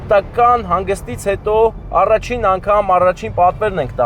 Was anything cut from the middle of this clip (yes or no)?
no